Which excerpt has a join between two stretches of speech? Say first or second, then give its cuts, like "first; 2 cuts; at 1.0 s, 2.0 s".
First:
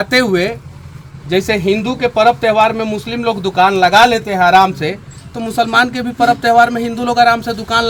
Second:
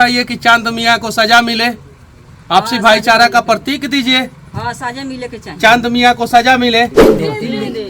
second; 1 cut; at 7.0 s